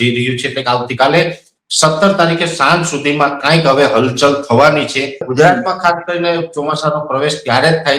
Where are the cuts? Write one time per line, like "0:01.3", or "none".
0:05.3